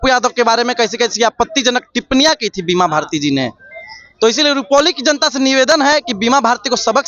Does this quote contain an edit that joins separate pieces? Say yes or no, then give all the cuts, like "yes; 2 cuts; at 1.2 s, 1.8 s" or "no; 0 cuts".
no; 0 cuts